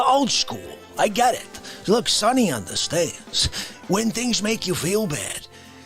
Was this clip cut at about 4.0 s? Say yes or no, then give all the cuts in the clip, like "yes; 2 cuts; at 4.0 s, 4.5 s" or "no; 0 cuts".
no; 1 cut; at 1.2 s